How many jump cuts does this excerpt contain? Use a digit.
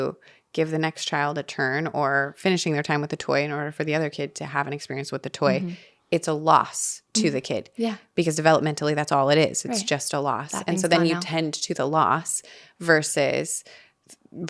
0